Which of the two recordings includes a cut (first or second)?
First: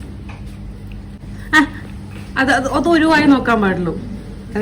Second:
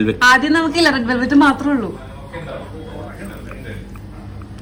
first